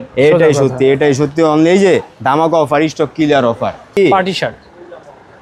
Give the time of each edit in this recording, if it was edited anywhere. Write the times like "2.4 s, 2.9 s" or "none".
3.9 s

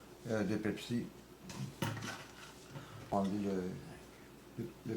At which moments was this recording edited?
3.1 s

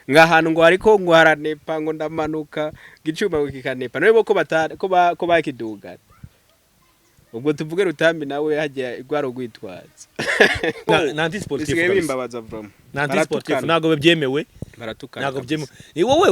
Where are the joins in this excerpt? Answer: 10.9 s

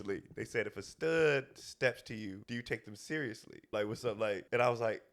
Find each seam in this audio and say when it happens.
2.4 s, 4.0 s

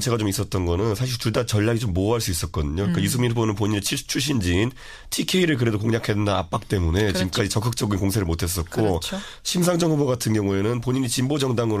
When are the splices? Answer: 3.0 s

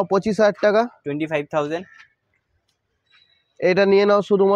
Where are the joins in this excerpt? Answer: none

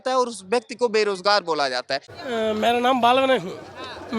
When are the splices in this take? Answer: 2.1 s

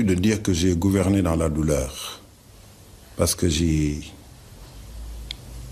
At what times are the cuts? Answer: none

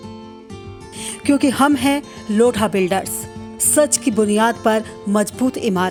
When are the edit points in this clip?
none

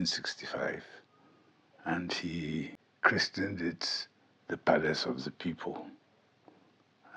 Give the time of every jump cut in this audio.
2.8 s

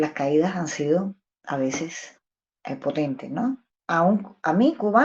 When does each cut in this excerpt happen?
3.7 s

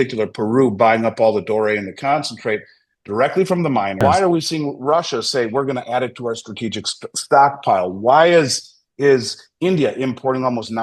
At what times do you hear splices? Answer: 4.0 s

